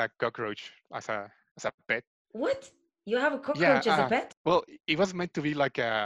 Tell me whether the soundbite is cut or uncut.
cut